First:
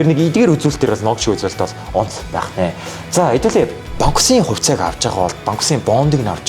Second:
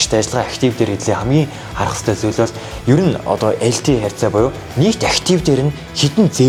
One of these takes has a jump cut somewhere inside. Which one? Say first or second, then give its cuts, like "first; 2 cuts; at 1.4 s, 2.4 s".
first; 1 cut; at 3.8 s